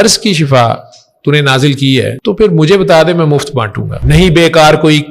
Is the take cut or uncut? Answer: cut